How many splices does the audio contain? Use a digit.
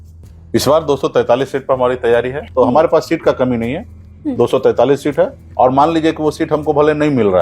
2